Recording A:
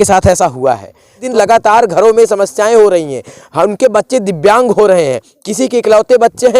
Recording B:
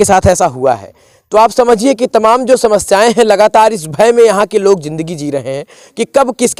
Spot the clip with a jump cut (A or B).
A